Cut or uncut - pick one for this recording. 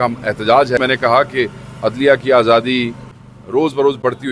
cut